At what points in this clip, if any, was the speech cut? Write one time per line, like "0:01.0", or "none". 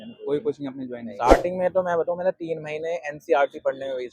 0:01.1

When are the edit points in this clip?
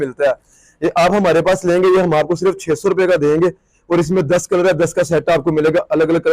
none

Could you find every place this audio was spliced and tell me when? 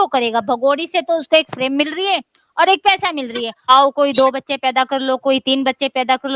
0:03.7

